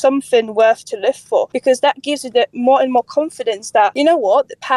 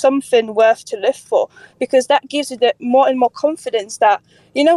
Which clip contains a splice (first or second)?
first